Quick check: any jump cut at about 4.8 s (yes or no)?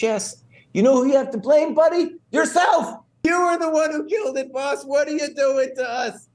no